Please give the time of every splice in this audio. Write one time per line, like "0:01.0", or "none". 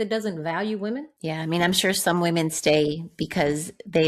0:01.1